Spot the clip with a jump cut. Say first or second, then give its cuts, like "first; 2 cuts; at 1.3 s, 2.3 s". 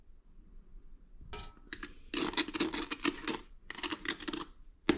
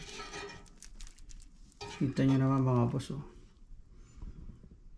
first; 1 cut; at 1.4 s